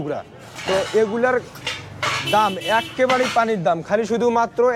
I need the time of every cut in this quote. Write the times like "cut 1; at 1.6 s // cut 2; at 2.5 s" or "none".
none